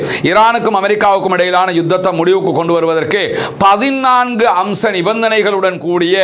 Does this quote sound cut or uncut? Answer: uncut